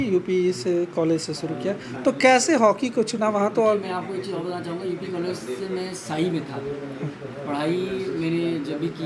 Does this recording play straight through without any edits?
yes; 0 cuts

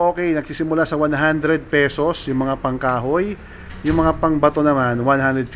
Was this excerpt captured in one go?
yes; 0 cuts

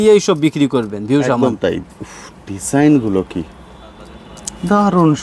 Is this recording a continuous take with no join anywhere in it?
yes; 0 cuts

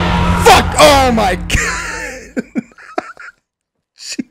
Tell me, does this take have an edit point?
no; 0 cuts

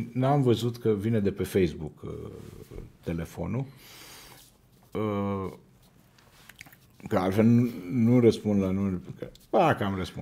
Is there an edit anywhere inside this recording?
no; 0 cuts

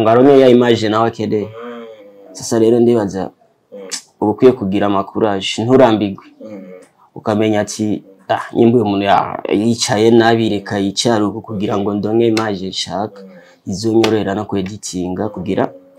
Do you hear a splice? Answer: no; 0 cuts

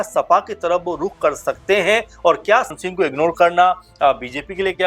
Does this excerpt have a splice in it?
yes; 1 cut; at 2.8 s

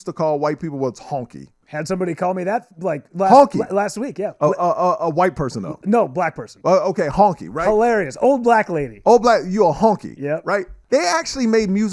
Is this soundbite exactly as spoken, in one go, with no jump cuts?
no; 2 cuts; at 1.6 s, 10.8 s

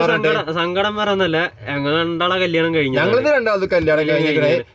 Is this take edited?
no; 0 cuts

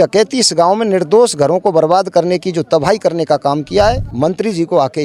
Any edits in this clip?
yes; 1 cut; at 4.1 s

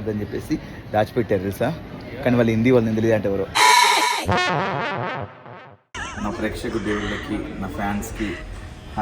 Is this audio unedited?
no; 1 cut; at 5.9 s

